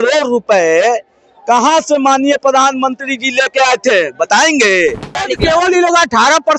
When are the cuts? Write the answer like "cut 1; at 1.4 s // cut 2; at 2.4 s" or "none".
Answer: cut 1; at 5.2 s